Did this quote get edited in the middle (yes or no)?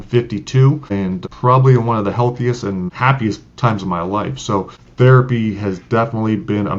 yes